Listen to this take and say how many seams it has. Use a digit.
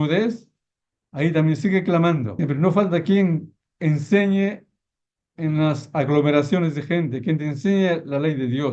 1